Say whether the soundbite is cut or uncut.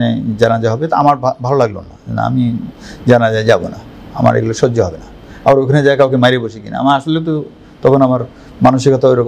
uncut